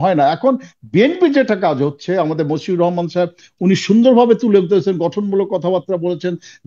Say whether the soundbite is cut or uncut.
uncut